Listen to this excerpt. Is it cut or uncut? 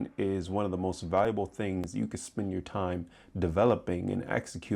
uncut